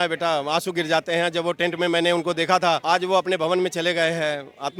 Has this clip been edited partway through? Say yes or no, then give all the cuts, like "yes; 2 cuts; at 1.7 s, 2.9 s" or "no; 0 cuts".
no; 0 cuts